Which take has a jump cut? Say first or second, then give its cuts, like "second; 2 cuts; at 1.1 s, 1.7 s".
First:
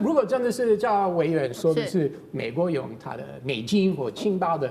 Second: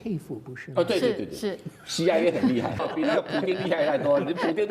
second; 1 cut; at 2.8 s